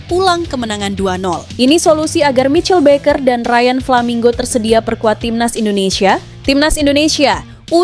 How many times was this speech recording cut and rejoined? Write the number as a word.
two